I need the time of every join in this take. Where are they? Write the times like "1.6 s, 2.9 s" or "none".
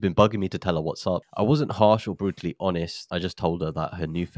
1.3 s, 3.0 s

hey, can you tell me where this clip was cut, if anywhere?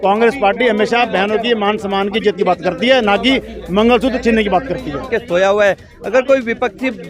5.0 s

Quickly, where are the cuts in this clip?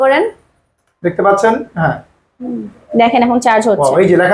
none

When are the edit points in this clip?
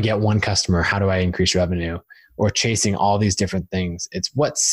none

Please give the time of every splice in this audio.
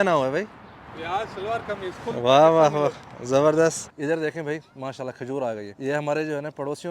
3.9 s, 5.7 s

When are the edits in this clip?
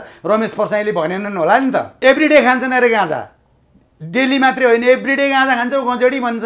1.9 s

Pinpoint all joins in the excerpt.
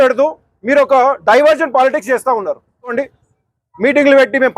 2.9 s

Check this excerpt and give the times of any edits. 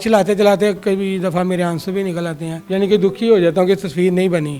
none

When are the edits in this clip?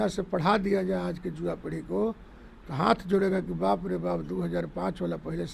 none

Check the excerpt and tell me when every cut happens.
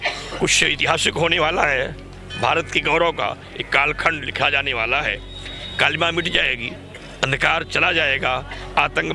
none

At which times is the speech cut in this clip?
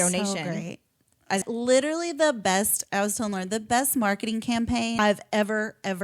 1.4 s, 5.0 s

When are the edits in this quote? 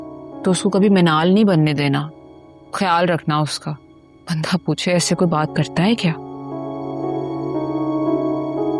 none

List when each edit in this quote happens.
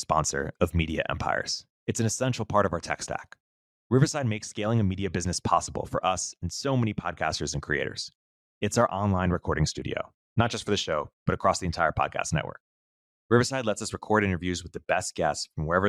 none

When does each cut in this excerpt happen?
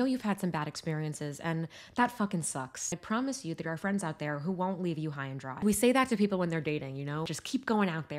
2.9 s, 5.6 s, 7.3 s

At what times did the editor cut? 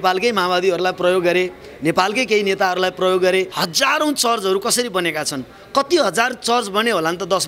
3.6 s

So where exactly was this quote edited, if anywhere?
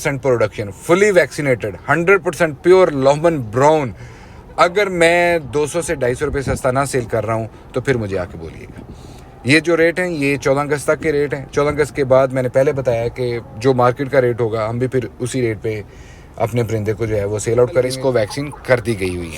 17.9 s

